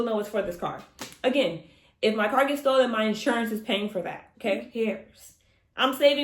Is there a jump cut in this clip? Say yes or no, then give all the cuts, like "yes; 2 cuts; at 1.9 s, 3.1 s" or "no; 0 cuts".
yes; 1 cut; at 4.7 s